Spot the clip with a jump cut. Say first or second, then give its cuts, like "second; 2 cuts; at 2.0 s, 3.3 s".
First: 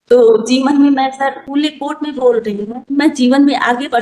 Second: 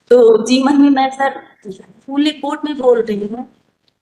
first; 2 cuts; at 0.9 s, 3.1 s